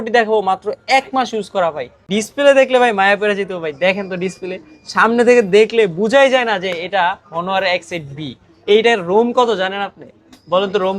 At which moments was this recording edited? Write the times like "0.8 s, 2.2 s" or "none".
2.0 s

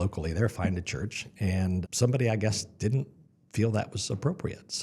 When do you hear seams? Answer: 1.8 s

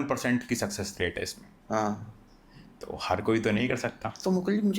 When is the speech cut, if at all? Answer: none

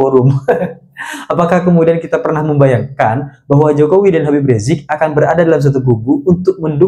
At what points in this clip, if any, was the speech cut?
none

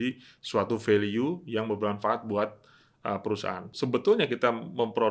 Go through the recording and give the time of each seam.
3.7 s

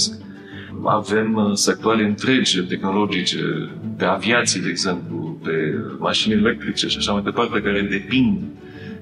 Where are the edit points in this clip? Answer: none

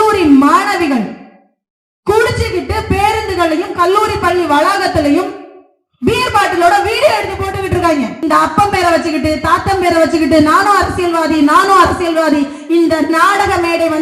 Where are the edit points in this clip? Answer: 8.1 s

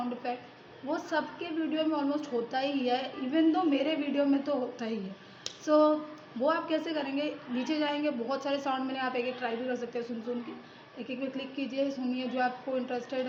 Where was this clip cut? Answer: none

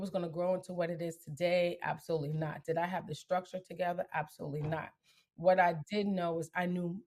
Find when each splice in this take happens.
none

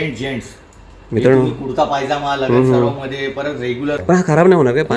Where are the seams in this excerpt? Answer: 4.0 s

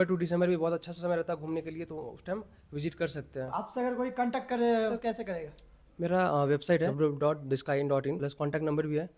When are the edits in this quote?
3.5 s, 5.0 s, 6.9 s, 8.3 s

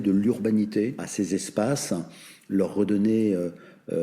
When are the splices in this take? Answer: 1.0 s

